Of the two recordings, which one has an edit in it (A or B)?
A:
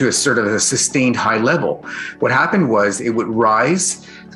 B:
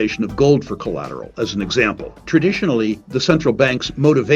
B